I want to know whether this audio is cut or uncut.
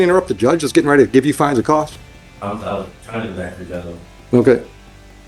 uncut